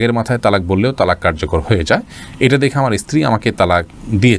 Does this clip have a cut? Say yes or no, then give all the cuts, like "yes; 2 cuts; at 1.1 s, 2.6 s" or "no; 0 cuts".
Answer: no; 0 cuts